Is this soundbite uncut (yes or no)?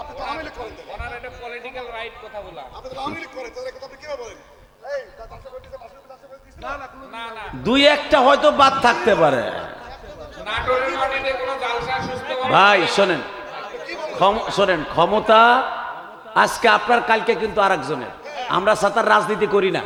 yes